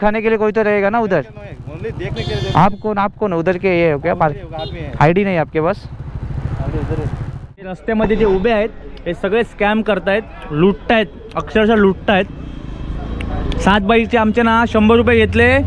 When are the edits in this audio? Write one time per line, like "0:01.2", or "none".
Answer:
0:07.7